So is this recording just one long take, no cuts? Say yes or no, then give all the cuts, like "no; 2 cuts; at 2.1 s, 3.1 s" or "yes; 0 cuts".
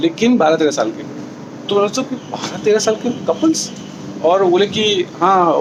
yes; 0 cuts